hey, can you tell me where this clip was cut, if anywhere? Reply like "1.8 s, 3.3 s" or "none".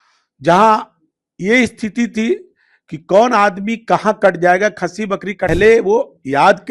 5.5 s